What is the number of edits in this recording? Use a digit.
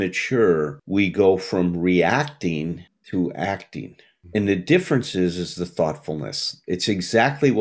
0